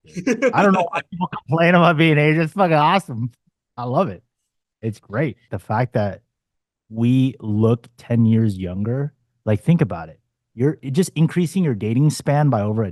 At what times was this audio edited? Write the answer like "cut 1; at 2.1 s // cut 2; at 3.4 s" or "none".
cut 1; at 5.5 s

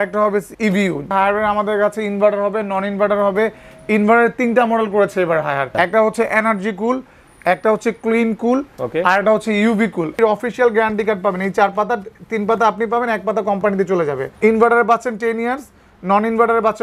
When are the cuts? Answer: cut 1; at 0.9 s // cut 2; at 5.7 s // cut 3; at 10.2 s // cut 4; at 14.3 s

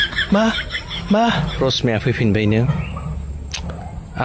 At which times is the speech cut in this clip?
cut 1; at 1.5 s

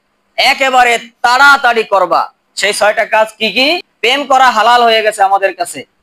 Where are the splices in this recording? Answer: cut 1; at 3.9 s

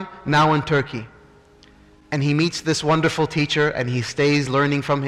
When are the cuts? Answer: none

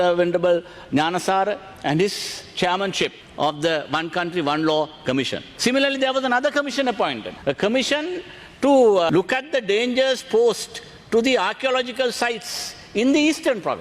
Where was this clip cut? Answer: cut 1; at 3.2 s // cut 2; at 5.4 s // cut 3; at 7.3 s // cut 4; at 9.1 s

